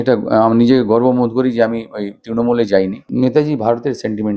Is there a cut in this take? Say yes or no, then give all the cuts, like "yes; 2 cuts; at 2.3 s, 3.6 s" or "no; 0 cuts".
yes; 1 cut; at 3.0 s